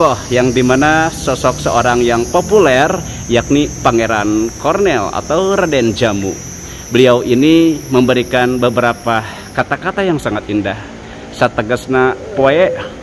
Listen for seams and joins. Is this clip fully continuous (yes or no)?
yes